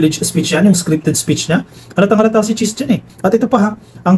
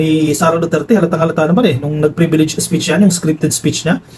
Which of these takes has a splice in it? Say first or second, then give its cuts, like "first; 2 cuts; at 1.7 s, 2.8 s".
first; 1 cut; at 3.1 s